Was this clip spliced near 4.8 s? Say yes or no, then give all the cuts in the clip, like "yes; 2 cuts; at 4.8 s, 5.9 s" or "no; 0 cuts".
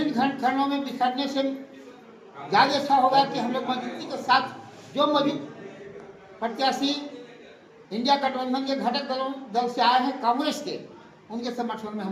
no; 0 cuts